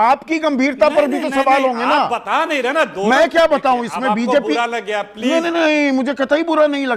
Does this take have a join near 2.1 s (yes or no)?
no